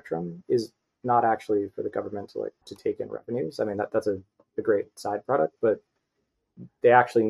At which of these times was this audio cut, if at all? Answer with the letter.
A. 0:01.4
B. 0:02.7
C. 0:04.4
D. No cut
B